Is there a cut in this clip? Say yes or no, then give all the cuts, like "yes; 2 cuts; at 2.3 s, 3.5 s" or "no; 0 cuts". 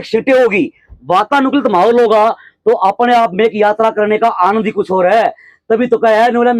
no; 0 cuts